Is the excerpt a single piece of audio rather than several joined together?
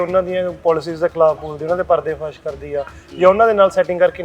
yes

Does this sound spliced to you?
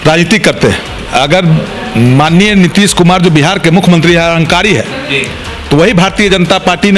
yes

